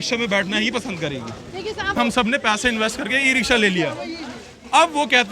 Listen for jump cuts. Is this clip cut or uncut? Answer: cut